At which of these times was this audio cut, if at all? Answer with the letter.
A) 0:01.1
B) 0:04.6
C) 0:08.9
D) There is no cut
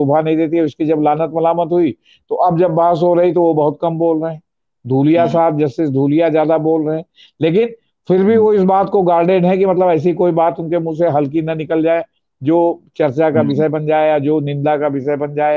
D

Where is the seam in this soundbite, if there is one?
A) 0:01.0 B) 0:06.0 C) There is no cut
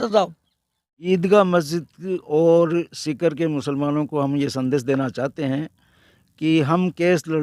A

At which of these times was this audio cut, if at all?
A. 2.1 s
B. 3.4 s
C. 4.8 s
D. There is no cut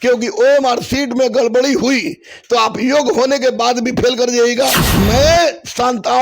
C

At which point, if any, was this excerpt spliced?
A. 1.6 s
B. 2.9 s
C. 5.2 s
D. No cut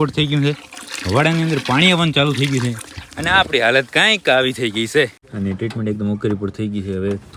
C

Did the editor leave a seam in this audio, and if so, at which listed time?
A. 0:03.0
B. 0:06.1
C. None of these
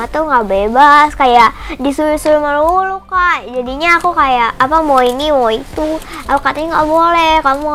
C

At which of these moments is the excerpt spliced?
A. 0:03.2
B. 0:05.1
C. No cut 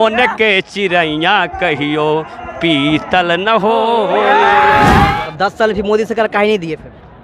B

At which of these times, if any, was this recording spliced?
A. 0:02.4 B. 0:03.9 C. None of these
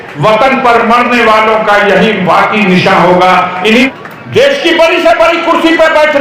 B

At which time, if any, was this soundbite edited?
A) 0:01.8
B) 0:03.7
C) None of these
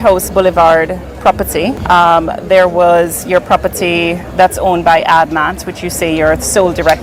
A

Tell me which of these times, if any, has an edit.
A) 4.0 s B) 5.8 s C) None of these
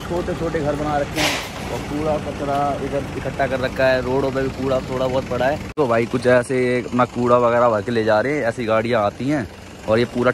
B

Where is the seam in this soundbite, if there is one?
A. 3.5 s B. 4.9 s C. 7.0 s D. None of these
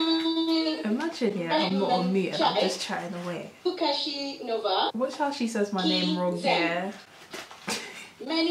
B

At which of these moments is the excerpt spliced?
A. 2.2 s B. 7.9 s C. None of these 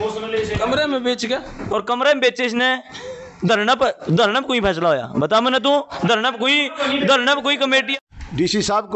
B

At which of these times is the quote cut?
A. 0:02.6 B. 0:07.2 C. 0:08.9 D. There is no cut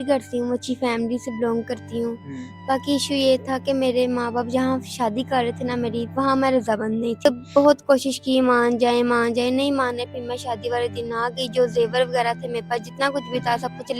B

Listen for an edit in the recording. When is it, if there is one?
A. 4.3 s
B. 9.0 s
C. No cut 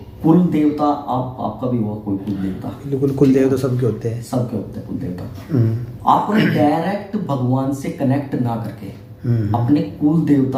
C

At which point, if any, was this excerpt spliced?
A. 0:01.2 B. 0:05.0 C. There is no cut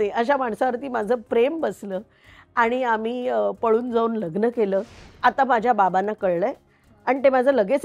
B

